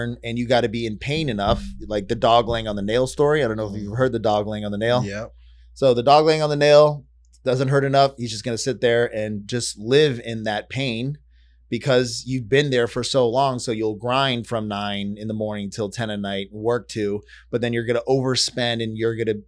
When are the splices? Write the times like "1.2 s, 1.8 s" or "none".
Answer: none